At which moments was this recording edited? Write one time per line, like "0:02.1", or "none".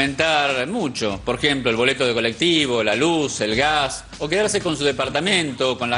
none